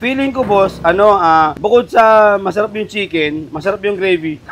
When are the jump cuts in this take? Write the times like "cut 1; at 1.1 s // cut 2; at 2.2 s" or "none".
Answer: cut 1; at 1.6 s